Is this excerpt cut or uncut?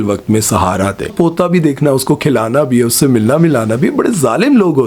cut